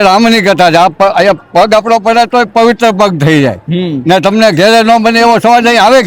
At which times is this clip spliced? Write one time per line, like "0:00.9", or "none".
none

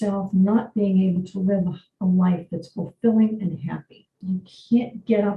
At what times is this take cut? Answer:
0:04.1

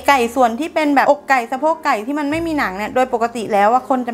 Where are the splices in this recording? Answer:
0:01.0

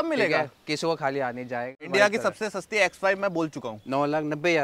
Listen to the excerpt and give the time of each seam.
0:01.8

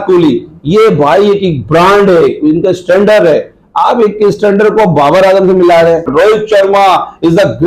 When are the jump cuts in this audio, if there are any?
0:06.1

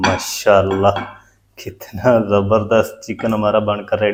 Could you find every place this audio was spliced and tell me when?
none

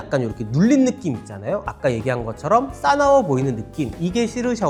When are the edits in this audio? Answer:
none

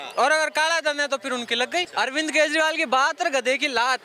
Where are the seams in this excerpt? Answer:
0:01.9

